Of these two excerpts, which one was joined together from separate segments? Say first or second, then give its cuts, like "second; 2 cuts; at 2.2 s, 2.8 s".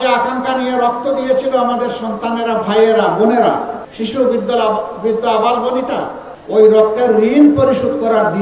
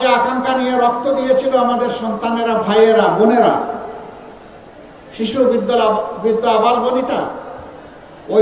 first; 2 cuts; at 3.8 s, 6.3 s